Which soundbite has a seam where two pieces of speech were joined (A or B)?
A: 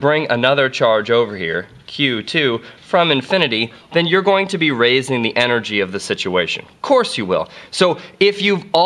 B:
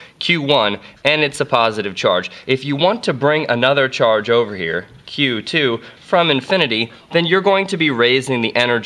B